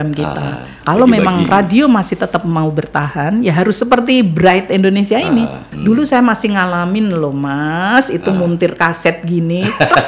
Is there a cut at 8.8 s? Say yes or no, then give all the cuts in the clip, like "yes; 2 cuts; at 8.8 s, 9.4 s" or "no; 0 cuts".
no; 2 cuts; at 0.8 s, 5.6 s